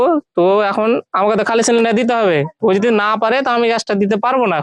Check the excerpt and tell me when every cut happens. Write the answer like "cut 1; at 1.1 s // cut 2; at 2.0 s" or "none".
none